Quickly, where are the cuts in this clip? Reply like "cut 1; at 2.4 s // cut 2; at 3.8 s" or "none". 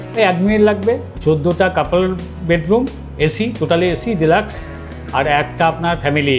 cut 1; at 1.1 s